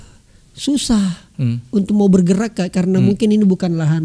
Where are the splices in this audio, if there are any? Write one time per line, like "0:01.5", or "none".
none